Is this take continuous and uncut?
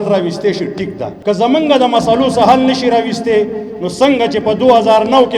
no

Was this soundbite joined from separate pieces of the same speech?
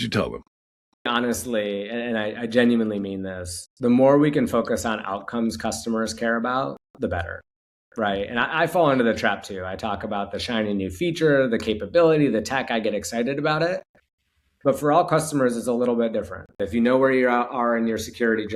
yes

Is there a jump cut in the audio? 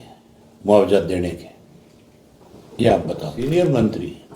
yes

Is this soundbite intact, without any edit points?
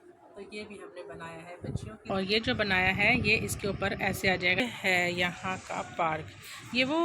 no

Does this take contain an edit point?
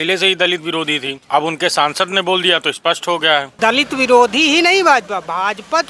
yes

